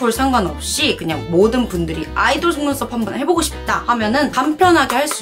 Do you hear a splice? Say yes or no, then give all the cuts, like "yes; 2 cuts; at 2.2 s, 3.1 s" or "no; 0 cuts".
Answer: no; 0 cuts